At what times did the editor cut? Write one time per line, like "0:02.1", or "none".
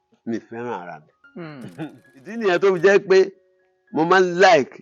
0:02.4